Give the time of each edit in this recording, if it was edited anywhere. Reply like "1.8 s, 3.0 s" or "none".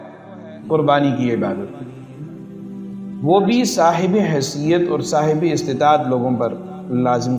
none